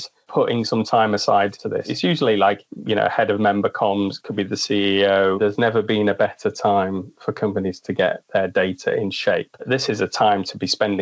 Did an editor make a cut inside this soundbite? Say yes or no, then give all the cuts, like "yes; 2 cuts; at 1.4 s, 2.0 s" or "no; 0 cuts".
yes; 3 cuts; at 1.8 s, 5.4 s, 9.7 s